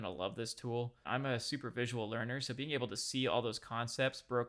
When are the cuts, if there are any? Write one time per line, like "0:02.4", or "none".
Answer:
0:01.1